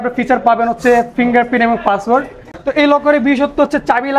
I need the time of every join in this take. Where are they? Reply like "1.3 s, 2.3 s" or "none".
2.4 s